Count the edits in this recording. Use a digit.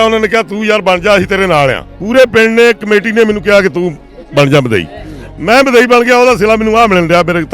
1